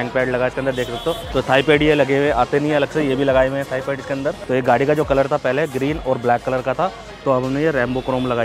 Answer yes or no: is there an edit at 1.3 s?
yes